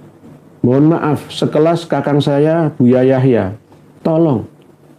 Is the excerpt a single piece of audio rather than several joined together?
no; 1 cut; at 4.1 s

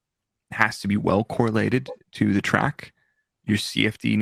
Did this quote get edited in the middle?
no; 0 cuts

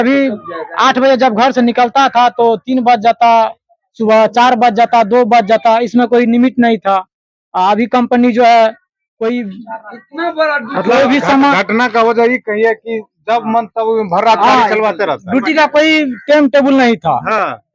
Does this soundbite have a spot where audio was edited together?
no; 0 cuts

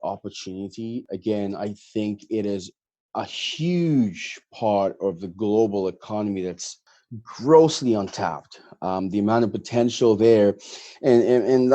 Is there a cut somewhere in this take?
yes; 1 cut; at 1.0 s

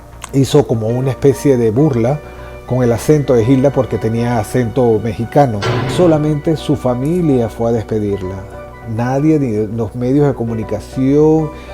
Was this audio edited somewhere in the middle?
yes; 1 cut; at 5.9 s

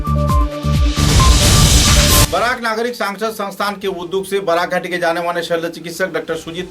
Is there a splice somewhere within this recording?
yes; 1 cut; at 2.3 s

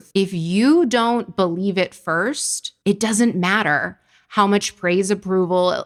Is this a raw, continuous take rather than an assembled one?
yes; 0 cuts

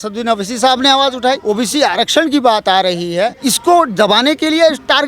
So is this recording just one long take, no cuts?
no; 2 cuts; at 1.4 s, 3.4 s

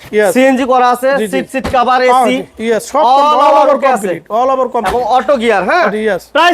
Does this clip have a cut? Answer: no; 0 cuts

